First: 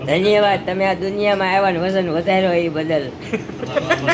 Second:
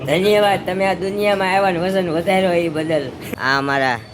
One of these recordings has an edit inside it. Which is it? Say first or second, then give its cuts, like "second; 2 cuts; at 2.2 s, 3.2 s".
second; 1 cut; at 3.2 s